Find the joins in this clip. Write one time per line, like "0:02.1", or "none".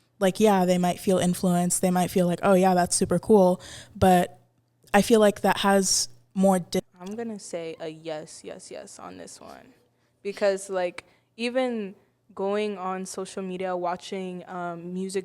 0:06.8